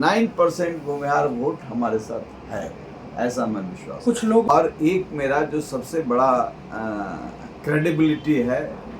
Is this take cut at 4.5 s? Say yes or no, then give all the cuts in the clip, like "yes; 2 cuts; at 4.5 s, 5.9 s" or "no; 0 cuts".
yes; 1 cut; at 4.5 s